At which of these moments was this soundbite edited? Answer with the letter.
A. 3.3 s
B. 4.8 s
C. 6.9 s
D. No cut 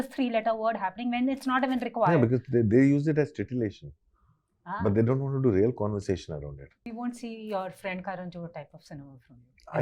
C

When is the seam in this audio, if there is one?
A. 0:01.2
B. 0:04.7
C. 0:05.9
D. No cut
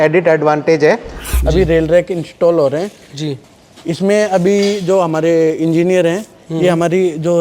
A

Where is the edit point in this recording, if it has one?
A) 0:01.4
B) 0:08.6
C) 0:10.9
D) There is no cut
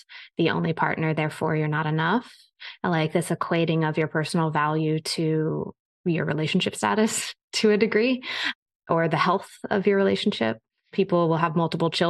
C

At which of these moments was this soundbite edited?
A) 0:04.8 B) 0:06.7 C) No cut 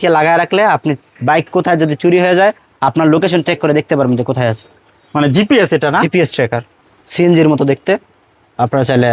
B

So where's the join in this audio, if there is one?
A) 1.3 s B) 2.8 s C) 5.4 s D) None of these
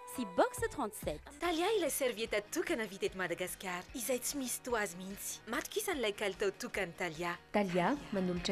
A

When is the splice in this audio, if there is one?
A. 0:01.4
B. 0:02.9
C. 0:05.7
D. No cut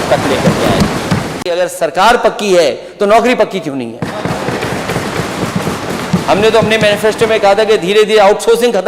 A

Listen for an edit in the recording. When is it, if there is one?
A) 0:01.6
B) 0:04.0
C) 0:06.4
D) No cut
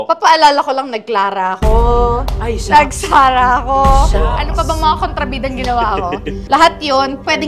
C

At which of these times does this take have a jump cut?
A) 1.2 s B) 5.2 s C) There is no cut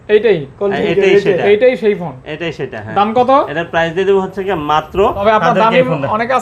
B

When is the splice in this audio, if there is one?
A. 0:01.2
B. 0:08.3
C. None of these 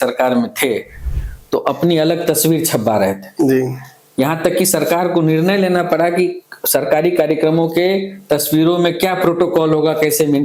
C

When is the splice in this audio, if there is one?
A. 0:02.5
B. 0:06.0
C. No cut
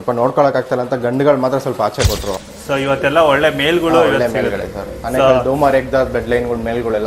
A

